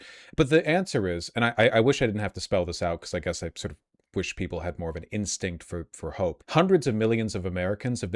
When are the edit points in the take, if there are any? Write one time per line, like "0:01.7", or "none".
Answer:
0:06.4